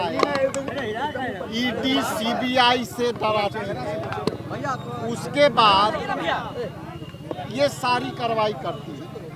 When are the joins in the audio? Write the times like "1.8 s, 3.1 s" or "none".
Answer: none

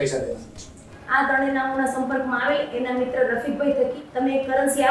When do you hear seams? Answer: 0.9 s, 4.0 s

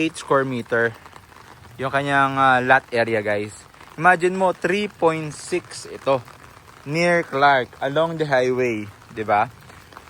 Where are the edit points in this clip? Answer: none

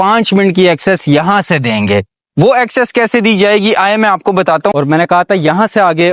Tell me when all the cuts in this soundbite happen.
4.7 s

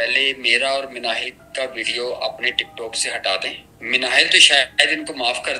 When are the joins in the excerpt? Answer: 3.7 s

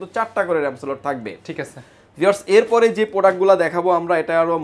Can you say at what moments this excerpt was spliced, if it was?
none

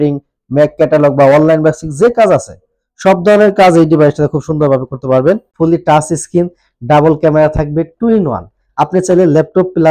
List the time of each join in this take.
5.5 s

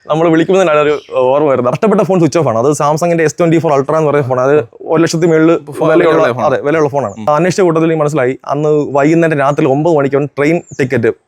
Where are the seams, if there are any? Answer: 1.7 s, 7.3 s

